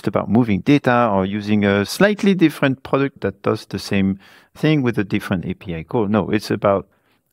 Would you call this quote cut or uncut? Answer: cut